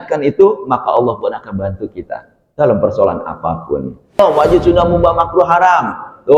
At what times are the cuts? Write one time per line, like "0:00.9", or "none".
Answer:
0:04.2